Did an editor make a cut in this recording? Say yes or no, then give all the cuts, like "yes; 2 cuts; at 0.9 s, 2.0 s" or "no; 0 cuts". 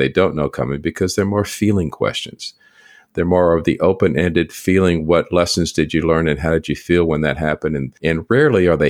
yes; 1 cut; at 7.9 s